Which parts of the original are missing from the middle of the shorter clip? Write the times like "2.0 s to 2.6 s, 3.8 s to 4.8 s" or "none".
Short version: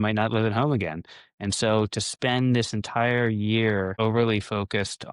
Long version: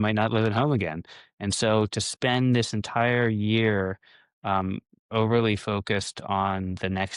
3.9 s to 5.1 s